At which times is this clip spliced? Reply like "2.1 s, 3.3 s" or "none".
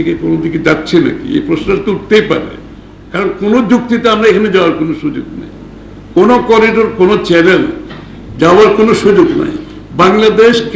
none

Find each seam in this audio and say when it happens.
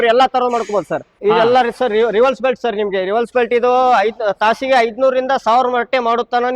1.1 s

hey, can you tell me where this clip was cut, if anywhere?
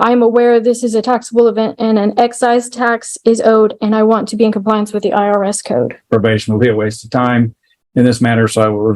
6.0 s

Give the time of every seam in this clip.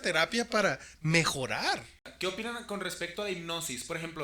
2.1 s

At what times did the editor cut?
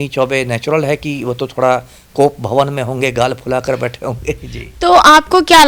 none

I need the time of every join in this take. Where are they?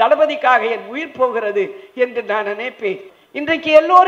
3.1 s

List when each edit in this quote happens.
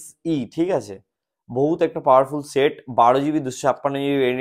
none

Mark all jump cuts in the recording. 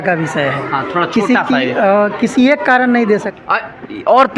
3.3 s

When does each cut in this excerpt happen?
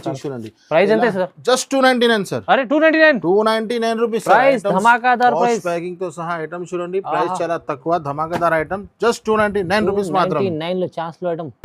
none

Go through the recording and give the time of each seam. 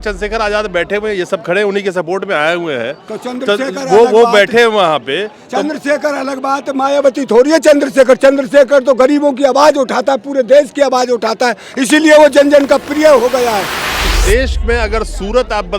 14.0 s

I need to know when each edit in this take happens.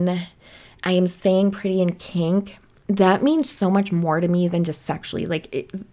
none

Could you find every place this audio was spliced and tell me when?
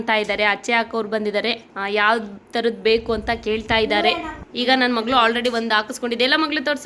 none

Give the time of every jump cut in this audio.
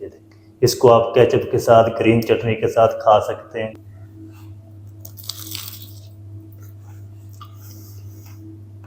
3.7 s

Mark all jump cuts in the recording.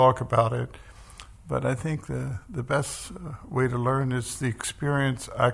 none

